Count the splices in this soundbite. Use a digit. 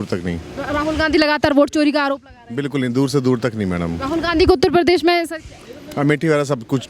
0